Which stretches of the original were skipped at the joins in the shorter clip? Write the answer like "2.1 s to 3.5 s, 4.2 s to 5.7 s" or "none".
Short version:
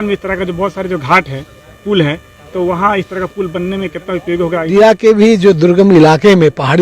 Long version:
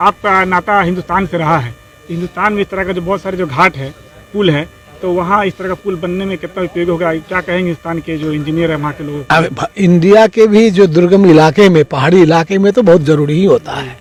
7.2 s to 10.0 s